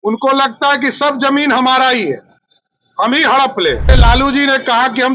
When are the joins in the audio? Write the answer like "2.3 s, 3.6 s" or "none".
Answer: 3.9 s